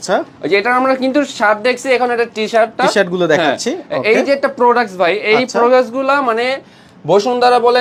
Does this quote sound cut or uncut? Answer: uncut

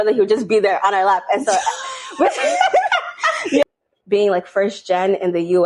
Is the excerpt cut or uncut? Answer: cut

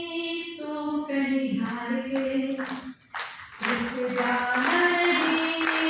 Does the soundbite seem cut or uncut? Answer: uncut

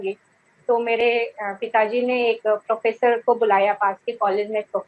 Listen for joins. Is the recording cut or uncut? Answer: uncut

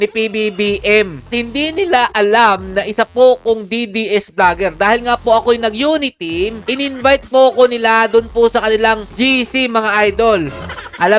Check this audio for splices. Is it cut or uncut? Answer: cut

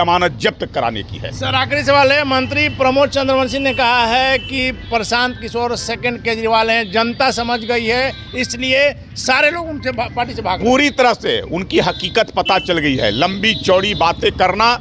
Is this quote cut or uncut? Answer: uncut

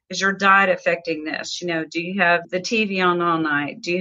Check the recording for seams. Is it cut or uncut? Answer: cut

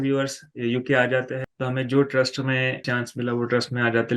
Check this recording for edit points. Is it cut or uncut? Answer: cut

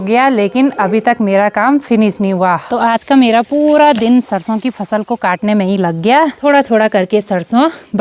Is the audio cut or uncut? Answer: cut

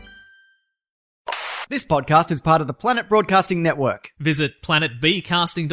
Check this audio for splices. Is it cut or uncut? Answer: cut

